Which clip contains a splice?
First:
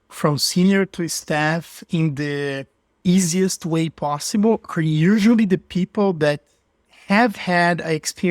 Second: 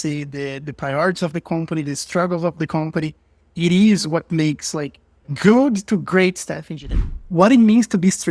second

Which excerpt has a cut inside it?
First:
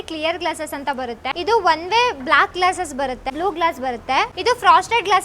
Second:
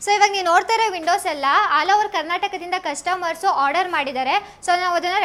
first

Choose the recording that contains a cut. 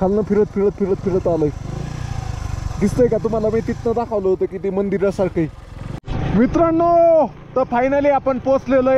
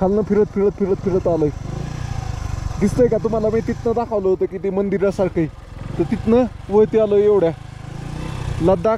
first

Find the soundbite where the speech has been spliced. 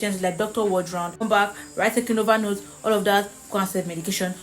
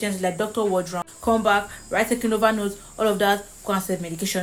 first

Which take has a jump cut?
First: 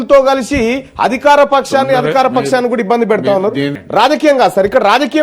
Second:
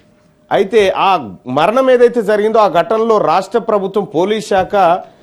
first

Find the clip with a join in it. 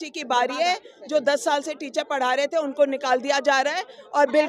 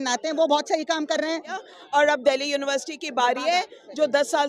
second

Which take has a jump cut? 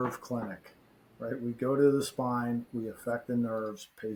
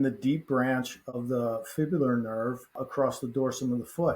second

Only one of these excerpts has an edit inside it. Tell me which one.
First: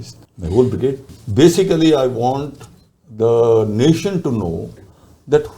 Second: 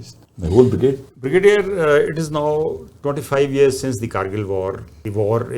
first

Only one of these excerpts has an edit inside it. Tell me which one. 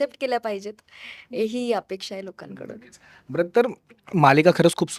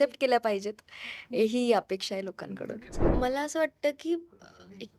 second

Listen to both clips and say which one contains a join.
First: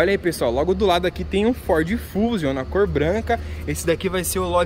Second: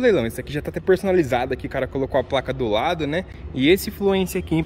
second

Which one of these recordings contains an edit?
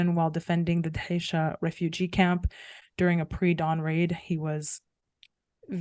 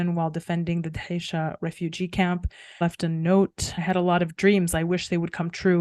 second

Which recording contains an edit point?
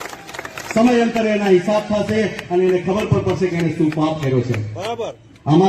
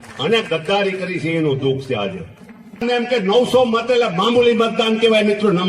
second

